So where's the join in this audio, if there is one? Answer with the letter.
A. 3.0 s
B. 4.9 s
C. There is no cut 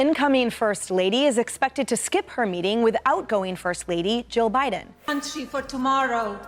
B